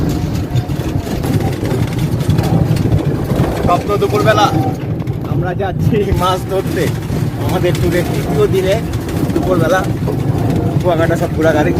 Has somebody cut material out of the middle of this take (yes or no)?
yes